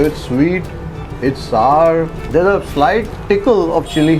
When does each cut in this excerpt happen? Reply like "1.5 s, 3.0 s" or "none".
2.2 s, 3.1 s

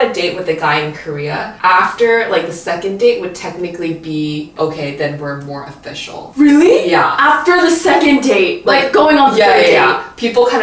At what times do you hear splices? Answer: 1.5 s, 4.5 s, 6.3 s

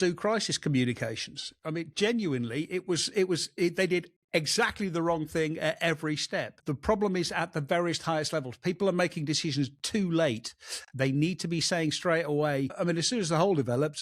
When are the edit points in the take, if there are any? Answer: 6.7 s, 12.8 s

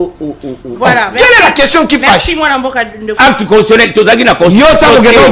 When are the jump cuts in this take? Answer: 3.1 s

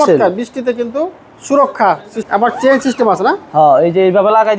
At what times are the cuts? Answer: 2.2 s

